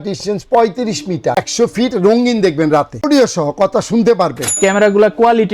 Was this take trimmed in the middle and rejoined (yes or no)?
yes